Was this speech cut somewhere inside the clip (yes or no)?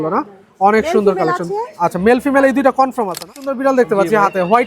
yes